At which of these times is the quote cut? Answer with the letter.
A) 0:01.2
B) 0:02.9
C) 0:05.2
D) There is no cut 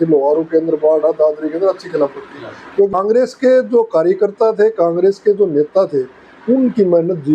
B